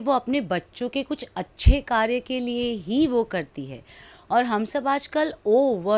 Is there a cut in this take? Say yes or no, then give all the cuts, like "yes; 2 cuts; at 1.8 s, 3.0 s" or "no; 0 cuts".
no; 0 cuts